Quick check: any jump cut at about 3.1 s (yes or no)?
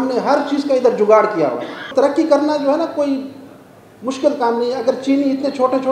no